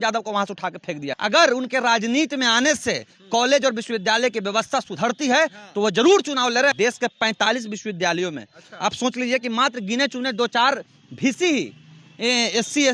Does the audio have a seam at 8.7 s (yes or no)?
no